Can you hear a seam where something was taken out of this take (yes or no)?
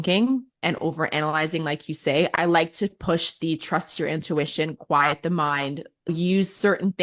no